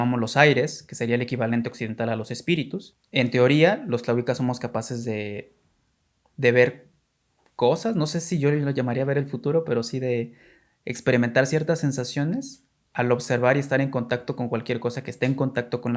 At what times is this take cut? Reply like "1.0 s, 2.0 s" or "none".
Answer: 3.0 s

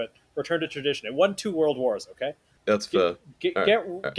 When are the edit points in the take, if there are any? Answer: 2.5 s

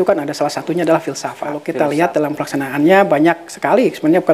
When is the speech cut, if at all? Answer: 1.5 s

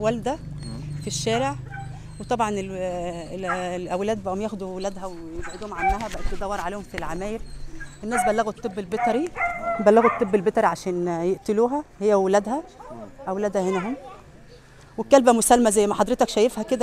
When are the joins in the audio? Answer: none

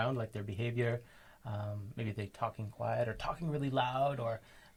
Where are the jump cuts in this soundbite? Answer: none

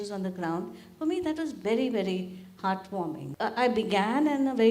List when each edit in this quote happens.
3.2 s

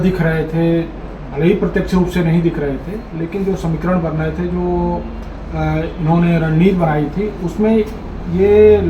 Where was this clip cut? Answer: none

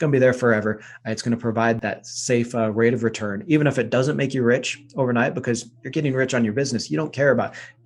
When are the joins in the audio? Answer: 1.8 s

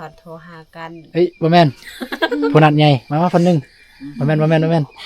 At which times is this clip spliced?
1.0 s

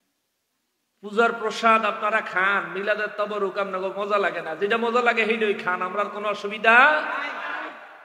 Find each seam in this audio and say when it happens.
none

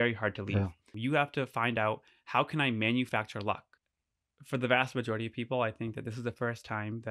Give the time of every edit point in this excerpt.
0.9 s, 4.1 s

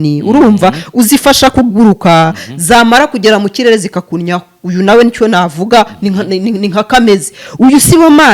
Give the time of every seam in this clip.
none

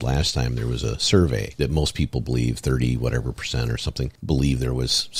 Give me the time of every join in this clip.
1.5 s, 4.2 s

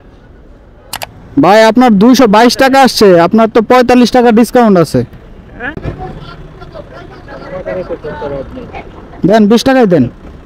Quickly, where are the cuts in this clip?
1.0 s, 5.4 s

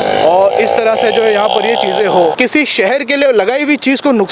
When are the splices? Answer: 2.3 s

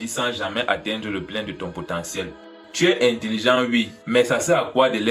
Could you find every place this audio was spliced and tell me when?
2.6 s

